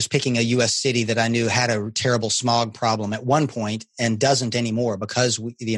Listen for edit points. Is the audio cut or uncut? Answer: uncut